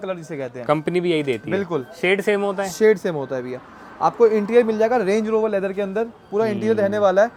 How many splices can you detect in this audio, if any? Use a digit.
0